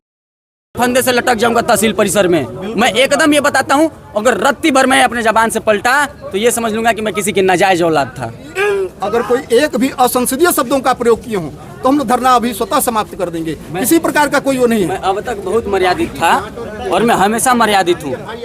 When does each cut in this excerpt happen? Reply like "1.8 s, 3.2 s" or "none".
8.9 s